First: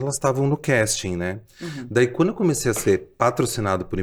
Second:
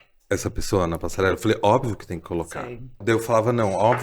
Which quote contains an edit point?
second; 1 cut; at 3.0 s

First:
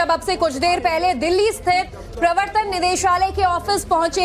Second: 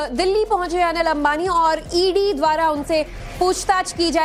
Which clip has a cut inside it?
first; 1 cut; at 1.6 s

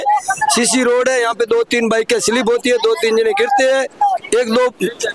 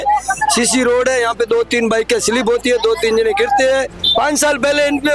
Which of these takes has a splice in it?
second; 1 cut; at 3.9 s

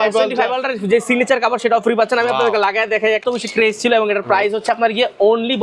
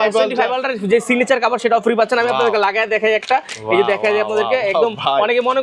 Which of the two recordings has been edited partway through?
first; 1 cut; at 3.2 s

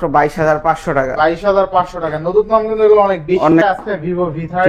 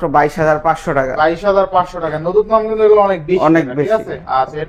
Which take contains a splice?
first; 1 cut; at 3.5 s

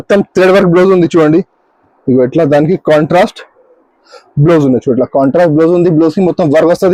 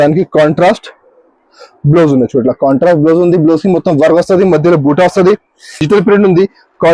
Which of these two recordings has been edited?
second; 1 cut; at 5.8 s

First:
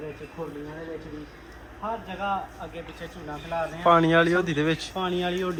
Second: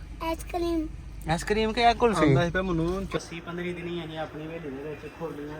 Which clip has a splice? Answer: second; 1 cut; at 3.1 s

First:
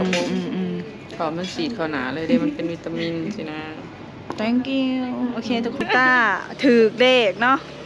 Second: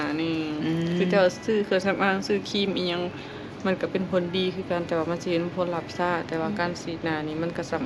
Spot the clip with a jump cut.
first; 1 cut; at 5.8 s

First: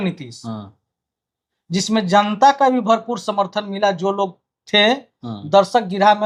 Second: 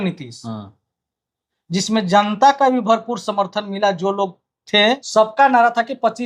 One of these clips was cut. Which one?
second; 1 cut; at 5.0 s

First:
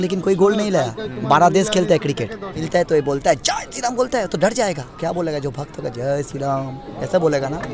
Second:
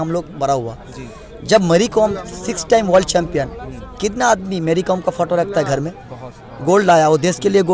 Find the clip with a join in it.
first; 1 cut; at 2.6 s

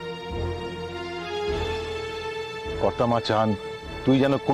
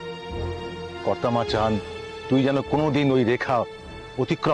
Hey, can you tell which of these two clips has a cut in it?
second; 1 cut; at 1.0 s

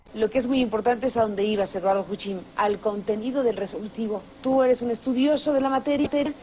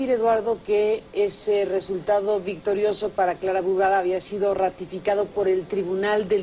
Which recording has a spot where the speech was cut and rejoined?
first; 1 cut; at 4.3 s

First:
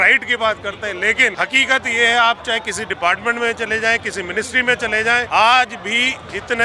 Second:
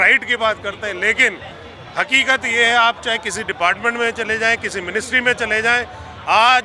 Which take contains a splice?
first; 2 cuts; at 1.3 s, 5.3 s

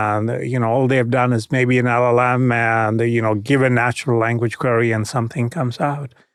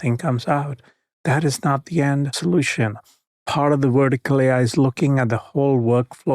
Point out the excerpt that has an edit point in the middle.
second; 1 cut; at 2.3 s

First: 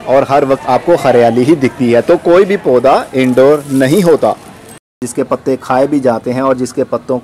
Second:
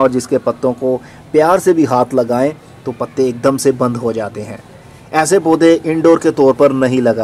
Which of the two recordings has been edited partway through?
first; 1 cut; at 5.0 s

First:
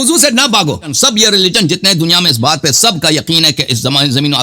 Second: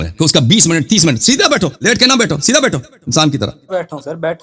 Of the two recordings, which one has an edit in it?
first; 1 cut; at 0.9 s

